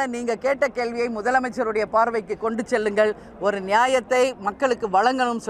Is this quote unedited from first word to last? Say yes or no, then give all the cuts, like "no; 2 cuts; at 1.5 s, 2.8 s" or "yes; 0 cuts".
yes; 0 cuts